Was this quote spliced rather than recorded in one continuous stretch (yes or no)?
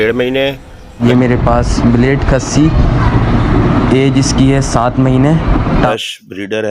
yes